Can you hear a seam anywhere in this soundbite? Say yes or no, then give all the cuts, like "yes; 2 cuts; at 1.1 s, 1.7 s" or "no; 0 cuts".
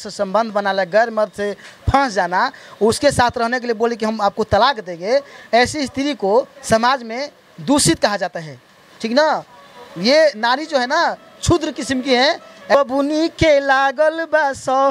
yes; 1 cut; at 12.7 s